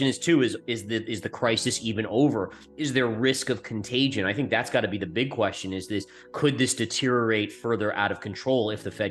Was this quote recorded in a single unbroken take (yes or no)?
yes